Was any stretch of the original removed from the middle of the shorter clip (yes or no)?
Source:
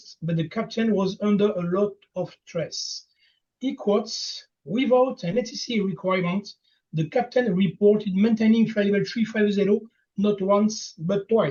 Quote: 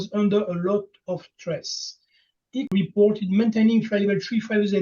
yes